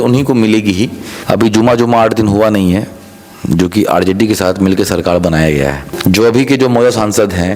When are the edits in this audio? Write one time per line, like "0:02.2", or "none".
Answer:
0:01.1
0:05.8